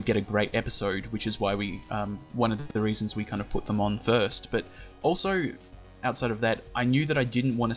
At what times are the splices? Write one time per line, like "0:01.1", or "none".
none